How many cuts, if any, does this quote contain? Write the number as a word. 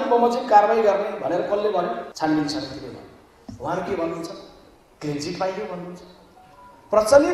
one